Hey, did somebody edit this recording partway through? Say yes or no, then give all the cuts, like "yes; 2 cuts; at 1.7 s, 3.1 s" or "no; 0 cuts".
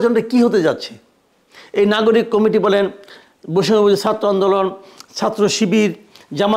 no; 0 cuts